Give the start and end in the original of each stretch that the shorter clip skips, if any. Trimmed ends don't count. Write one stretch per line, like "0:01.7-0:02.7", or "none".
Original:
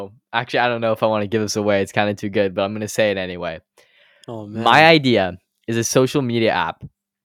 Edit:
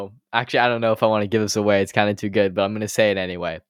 none